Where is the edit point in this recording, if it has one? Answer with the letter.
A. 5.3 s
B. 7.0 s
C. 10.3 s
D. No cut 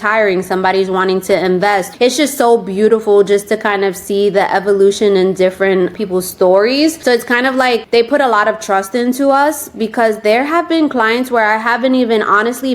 B